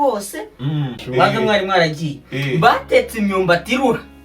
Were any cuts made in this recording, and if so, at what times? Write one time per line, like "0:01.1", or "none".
0:00.9